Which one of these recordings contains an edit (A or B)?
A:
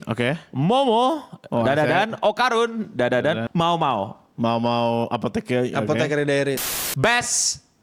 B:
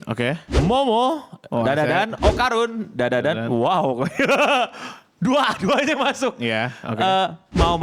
A